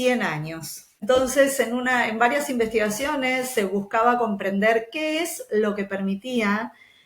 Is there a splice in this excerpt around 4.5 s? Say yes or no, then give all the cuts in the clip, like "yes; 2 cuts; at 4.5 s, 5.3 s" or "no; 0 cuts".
no; 1 cut; at 1.0 s